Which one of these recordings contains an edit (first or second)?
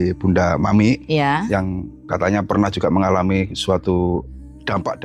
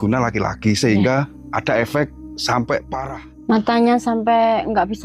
second